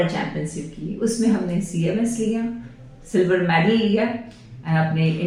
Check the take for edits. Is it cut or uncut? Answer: uncut